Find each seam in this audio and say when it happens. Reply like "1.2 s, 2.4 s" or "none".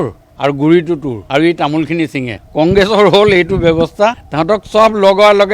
1.1 s, 4.3 s